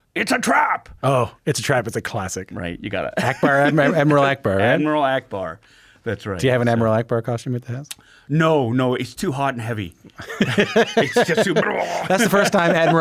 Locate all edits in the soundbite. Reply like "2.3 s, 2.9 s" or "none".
none